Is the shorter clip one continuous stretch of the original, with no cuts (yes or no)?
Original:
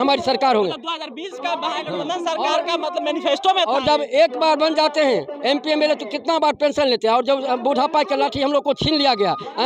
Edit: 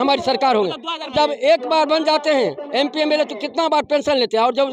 no